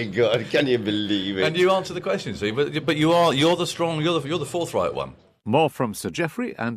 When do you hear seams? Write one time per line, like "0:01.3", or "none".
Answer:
0:05.2